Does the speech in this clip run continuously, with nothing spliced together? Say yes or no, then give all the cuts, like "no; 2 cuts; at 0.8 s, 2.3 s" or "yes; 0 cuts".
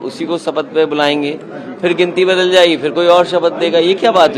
yes; 0 cuts